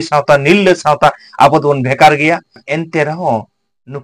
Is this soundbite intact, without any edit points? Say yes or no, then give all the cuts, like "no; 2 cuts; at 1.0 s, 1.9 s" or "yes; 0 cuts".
no; 1 cut; at 2.6 s